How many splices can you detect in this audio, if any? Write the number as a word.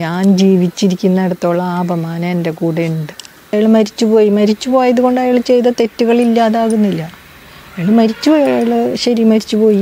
one